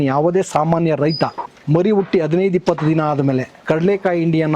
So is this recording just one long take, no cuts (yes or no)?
no